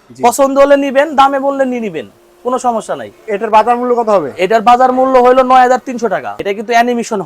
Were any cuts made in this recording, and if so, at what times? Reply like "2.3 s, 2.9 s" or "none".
6.3 s